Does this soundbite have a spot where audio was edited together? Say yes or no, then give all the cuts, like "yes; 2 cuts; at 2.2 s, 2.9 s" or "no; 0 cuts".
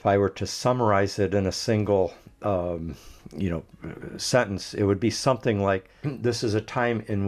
yes; 1 cut; at 6.0 s